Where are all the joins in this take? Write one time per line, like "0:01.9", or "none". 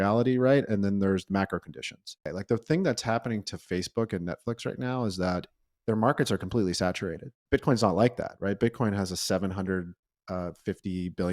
0:02.3
0:07.3

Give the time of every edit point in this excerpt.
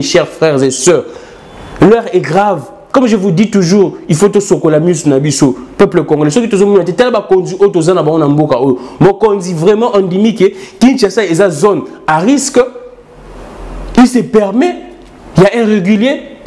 none

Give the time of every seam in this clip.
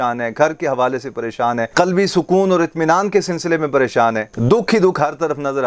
none

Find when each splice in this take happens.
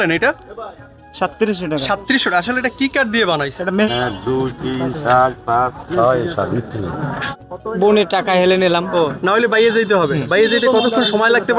0:03.9
0:07.2

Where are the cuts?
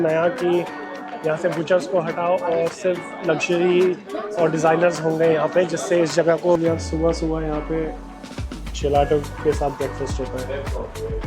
0:06.6

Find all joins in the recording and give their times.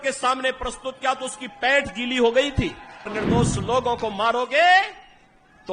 0:03.1

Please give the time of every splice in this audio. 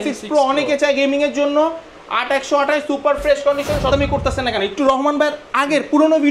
0:03.9

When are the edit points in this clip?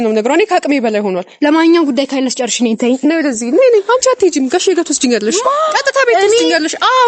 none

